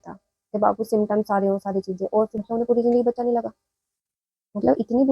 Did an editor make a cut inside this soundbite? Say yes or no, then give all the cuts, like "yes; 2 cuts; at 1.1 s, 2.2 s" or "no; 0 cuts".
yes; 1 cut; at 2.3 s